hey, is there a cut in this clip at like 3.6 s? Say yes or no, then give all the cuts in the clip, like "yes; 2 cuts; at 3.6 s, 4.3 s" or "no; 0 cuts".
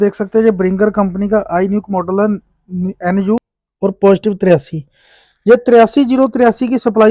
yes; 1 cut; at 3.6 s